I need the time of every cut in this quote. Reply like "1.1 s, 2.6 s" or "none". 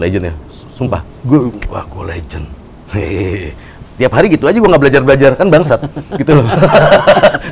1.1 s